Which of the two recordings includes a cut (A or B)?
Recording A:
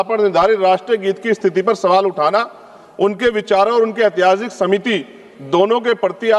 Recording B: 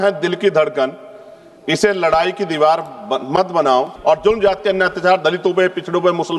B